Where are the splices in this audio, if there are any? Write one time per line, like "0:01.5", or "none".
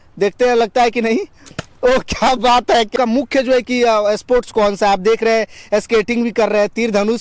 0:02.9